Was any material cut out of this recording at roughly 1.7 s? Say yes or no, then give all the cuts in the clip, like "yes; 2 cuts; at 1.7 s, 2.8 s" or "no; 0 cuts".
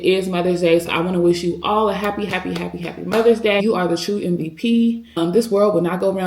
no; 2 cuts; at 3.6 s, 5.2 s